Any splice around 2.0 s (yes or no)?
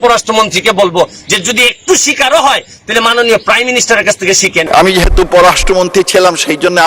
no